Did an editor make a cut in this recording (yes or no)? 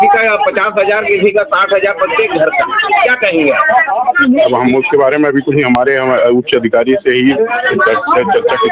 no